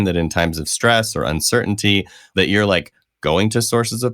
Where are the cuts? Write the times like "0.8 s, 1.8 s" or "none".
2.2 s